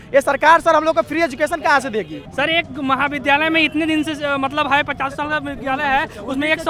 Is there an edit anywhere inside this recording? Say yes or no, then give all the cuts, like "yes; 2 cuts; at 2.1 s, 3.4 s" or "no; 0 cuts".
yes; 1 cut; at 2.2 s